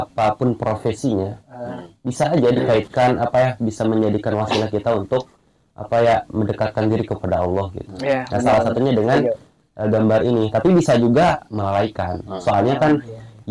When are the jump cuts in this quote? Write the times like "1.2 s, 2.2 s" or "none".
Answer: none